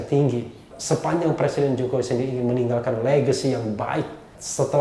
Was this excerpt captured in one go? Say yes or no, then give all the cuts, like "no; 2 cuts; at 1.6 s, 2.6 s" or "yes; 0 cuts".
yes; 0 cuts